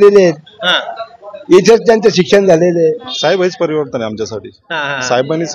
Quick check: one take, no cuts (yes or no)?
no